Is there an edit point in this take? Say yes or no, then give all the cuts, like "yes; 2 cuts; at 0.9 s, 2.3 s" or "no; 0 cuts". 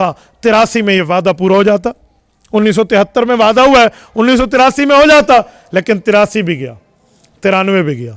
no; 0 cuts